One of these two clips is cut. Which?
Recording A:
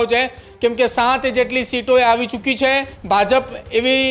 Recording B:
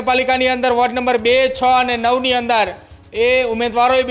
A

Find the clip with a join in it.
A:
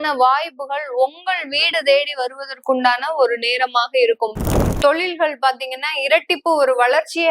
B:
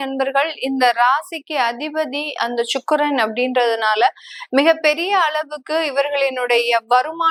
A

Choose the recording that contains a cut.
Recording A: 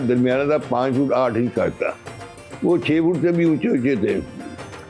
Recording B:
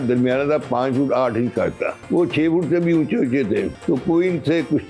B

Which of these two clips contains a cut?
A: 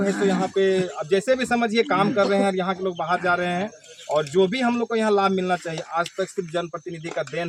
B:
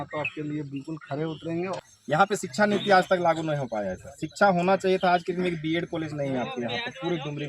B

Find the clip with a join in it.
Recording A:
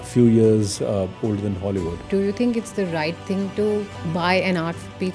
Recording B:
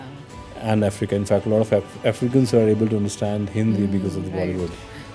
A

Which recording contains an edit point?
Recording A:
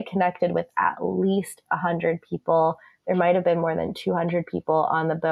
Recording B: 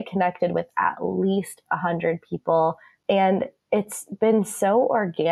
B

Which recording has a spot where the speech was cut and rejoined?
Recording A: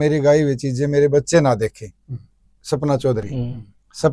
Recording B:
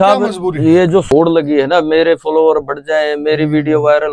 B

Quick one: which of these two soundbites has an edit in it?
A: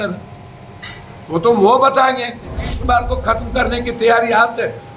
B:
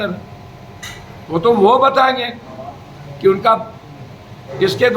A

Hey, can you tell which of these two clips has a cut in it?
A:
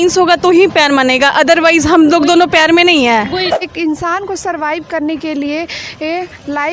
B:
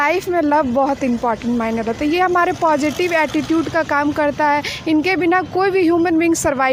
A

